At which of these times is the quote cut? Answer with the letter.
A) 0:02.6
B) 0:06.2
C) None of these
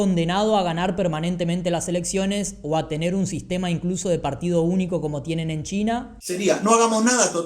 B